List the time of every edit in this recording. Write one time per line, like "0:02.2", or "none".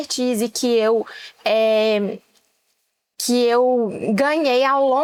none